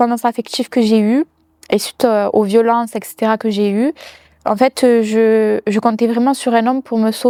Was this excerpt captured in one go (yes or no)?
yes